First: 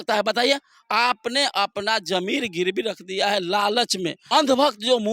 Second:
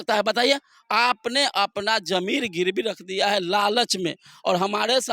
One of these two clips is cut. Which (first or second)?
first